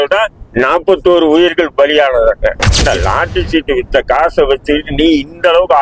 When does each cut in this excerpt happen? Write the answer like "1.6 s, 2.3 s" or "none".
2.7 s